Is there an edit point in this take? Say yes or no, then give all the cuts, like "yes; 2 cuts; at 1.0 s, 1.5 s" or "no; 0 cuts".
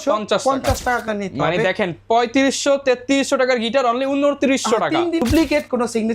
yes; 2 cuts; at 1.0 s, 5.2 s